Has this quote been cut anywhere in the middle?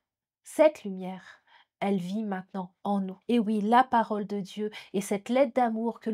yes; 1 cut; at 3.1 s

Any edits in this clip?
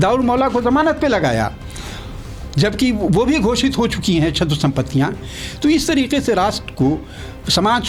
no; 0 cuts

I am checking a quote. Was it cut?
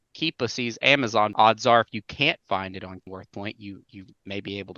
yes; 2 cuts; at 1.3 s, 3.1 s

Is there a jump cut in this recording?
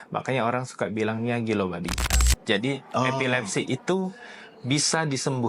yes; 1 cut; at 2.1 s

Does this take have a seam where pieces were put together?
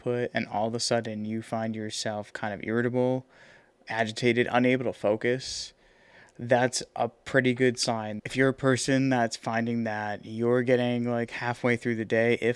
yes; 1 cut; at 8.2 s

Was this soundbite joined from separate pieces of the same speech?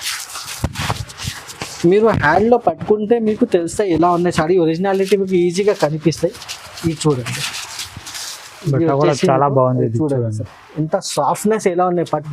no; 0 cuts

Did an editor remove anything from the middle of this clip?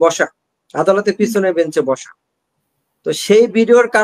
no; 0 cuts

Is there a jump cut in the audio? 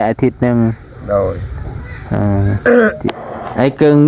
yes; 1 cut; at 3.0 s

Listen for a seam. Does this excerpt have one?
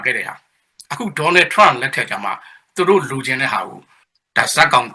yes; 1 cut; at 4.0 s

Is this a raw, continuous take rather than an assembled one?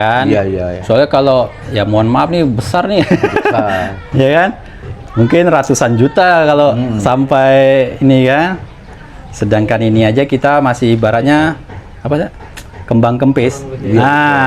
yes; 0 cuts

